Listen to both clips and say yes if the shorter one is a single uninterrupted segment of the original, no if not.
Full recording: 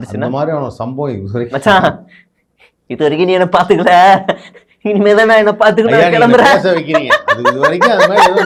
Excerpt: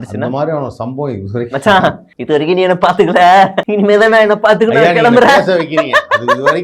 no